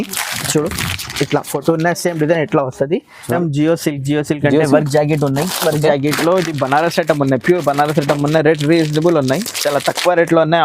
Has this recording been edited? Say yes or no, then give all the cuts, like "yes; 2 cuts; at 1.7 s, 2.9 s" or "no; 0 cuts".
yes; 1 cut; at 3.4 s